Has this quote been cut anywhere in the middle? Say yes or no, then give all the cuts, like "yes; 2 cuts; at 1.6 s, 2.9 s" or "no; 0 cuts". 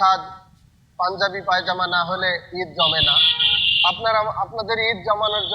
no; 0 cuts